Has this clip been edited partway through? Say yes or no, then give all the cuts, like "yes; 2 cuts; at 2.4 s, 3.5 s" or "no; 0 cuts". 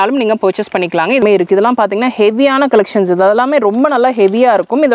yes; 1 cut; at 1.2 s